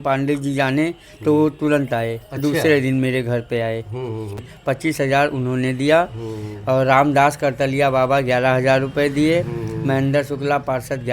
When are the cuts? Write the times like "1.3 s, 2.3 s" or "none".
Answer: 4.5 s